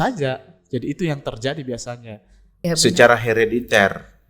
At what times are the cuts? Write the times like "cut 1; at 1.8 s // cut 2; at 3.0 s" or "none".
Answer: cut 1; at 2.6 s

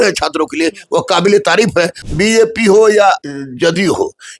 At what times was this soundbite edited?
cut 1; at 2.0 s // cut 2; at 3.2 s

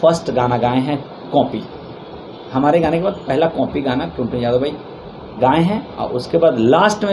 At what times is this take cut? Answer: none

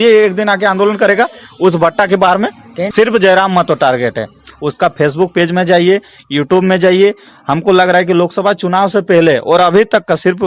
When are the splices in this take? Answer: cut 1; at 2.9 s

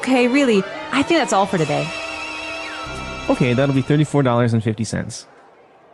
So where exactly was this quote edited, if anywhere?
cut 1; at 2.9 s

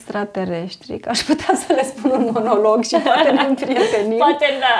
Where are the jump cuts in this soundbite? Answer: none

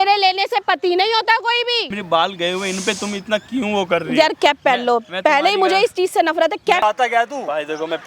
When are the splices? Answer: cut 1; at 2.0 s // cut 2; at 6.8 s

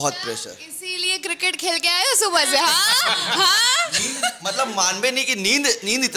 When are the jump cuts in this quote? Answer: none

